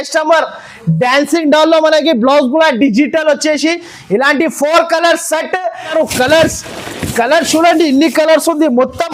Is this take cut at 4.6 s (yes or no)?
no